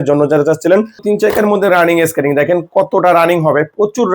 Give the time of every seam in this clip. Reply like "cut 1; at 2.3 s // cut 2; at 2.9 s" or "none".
cut 1; at 1.0 s